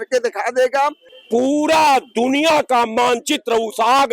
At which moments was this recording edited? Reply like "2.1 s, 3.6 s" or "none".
1.1 s

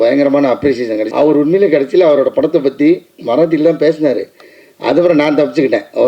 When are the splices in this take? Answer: 1.0 s

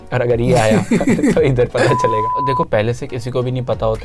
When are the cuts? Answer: 2.3 s

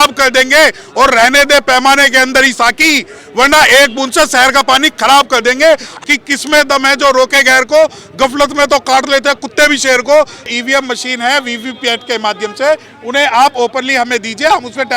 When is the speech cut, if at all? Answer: 6.0 s, 10.5 s

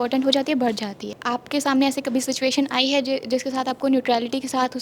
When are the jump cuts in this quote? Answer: 1.2 s

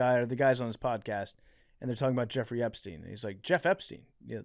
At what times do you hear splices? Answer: none

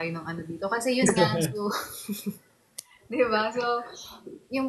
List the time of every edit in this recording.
none

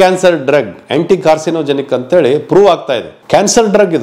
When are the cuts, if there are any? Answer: 3.1 s

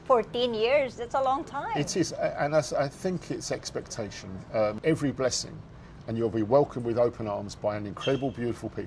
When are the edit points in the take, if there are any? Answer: 4.8 s

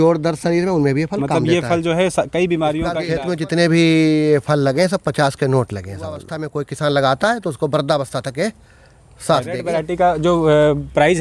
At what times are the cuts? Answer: 3.0 s, 6.4 s, 9.7 s

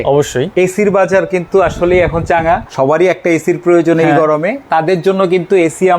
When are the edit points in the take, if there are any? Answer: 2.7 s

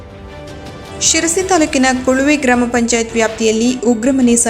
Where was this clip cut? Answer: 0.9 s

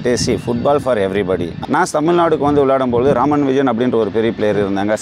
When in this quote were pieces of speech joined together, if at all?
1.5 s

